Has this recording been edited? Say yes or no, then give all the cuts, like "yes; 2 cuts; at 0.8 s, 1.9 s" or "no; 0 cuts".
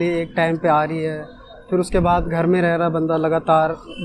no; 0 cuts